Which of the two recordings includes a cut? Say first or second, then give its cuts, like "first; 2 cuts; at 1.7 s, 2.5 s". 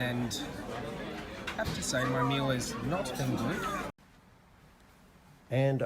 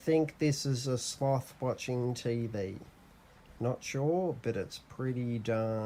first; 1 cut; at 3.9 s